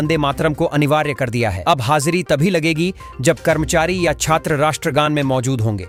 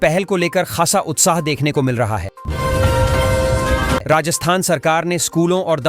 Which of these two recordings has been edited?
second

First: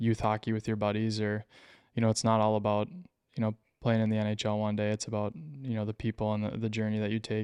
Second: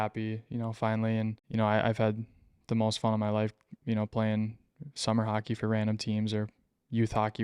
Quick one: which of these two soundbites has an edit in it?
second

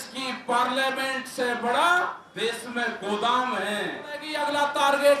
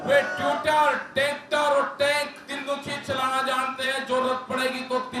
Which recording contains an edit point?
first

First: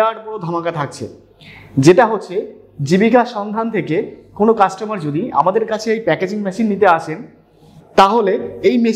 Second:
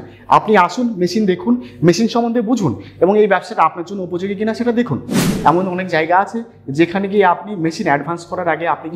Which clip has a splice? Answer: second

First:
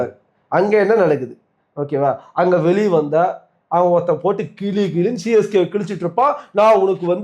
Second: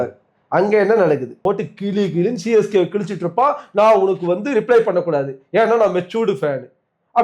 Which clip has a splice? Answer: second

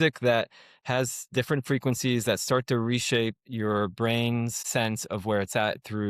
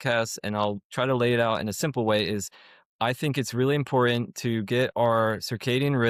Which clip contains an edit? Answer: first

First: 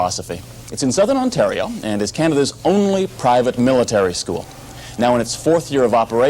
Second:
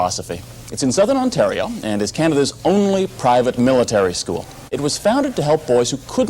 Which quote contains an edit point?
second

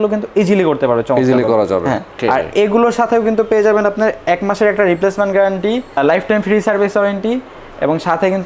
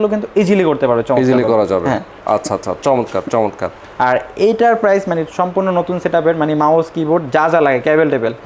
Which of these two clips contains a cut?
first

